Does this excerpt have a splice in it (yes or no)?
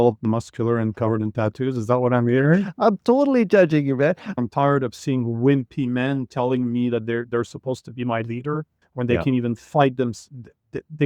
yes